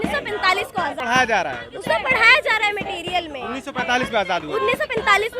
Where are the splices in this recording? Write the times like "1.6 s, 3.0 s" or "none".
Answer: 1.0 s